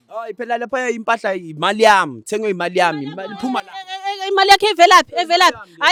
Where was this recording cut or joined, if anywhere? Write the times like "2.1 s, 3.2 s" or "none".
none